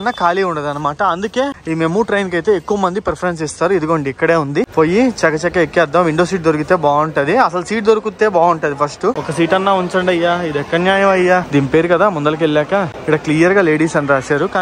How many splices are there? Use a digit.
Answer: 5